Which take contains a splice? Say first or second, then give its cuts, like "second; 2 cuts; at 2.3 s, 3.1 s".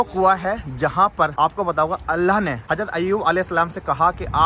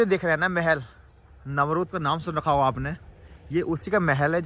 first; 2 cuts; at 1.3 s, 2.6 s